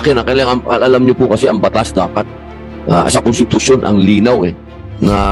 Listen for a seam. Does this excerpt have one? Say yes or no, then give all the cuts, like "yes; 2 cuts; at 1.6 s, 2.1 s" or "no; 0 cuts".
no; 0 cuts